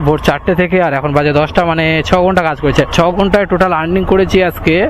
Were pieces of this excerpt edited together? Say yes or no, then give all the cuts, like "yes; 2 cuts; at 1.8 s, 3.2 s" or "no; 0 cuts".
no; 0 cuts